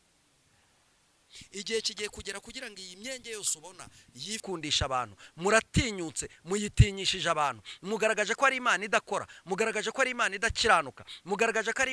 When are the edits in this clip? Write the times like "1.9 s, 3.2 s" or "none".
4.4 s

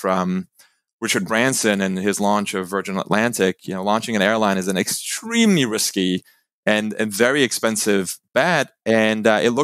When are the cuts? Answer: none

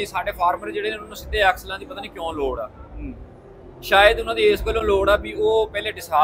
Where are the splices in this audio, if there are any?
none

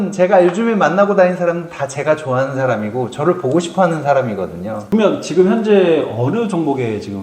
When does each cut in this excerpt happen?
4.8 s

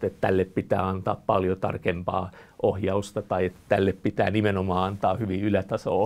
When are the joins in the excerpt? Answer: none

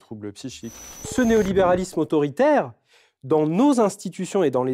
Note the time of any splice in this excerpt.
1.0 s

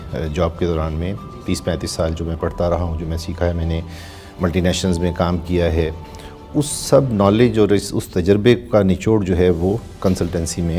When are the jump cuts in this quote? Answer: none

